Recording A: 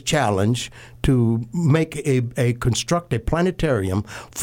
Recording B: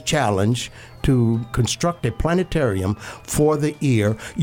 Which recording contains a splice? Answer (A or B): B